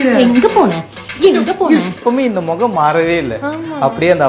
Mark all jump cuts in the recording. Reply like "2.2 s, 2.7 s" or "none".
2.0 s